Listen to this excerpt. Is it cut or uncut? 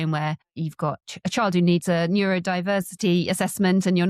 cut